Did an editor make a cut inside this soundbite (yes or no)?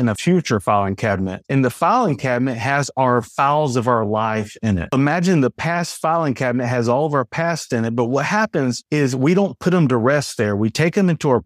no